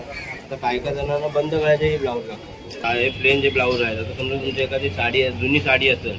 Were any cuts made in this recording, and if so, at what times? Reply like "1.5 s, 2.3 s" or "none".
2.8 s